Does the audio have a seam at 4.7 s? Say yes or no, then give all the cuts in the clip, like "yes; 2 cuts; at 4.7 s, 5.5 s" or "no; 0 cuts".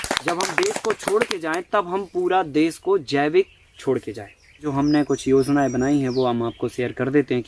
yes; 1 cut; at 4.7 s